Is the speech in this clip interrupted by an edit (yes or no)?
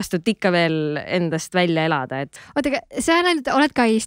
yes